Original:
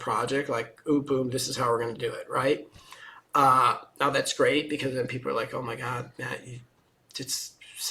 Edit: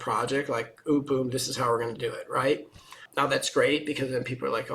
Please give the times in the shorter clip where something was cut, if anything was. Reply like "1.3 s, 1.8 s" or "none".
3.0 s